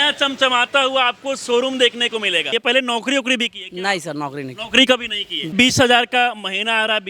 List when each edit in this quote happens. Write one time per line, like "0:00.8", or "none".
0:02.5
0:05.5